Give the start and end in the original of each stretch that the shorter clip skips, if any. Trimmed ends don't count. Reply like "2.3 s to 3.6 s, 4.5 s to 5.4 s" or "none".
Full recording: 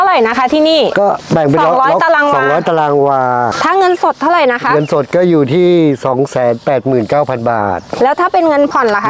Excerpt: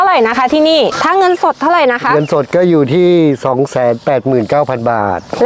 0.9 s to 3.5 s